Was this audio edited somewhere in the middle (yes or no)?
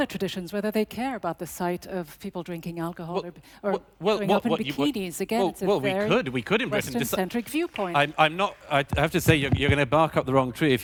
no